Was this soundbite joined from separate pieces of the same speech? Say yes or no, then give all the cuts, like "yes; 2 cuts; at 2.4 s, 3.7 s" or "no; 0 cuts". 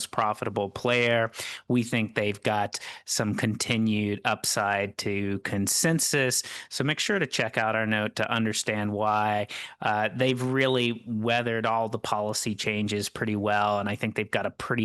no; 0 cuts